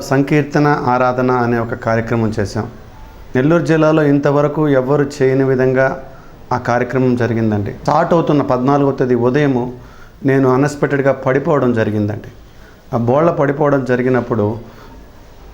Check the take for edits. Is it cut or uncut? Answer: cut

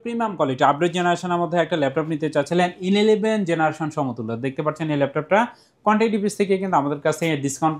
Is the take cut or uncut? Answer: uncut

